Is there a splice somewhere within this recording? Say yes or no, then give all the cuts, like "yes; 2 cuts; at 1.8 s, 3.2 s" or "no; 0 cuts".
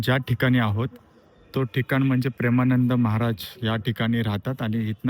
no; 0 cuts